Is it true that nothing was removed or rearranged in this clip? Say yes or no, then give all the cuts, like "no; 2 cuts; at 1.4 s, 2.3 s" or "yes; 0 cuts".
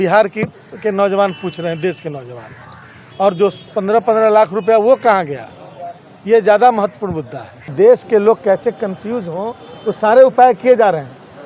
no; 1 cut; at 7.7 s